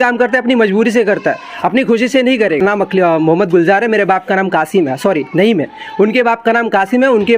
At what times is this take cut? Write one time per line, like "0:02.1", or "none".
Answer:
0:02.6